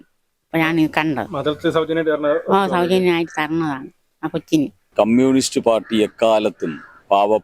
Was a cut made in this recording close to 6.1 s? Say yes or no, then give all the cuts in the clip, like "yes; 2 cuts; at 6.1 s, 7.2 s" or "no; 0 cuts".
no; 1 cut; at 4.8 s